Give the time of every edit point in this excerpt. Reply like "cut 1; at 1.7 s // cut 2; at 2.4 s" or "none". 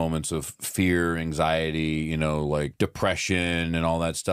cut 1; at 2.7 s